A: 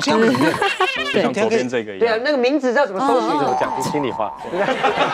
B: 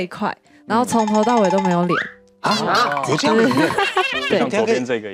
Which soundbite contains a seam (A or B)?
A